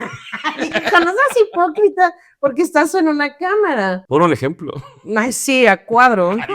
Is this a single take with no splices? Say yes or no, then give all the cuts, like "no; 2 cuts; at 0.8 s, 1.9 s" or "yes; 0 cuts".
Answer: no; 1 cut; at 4.0 s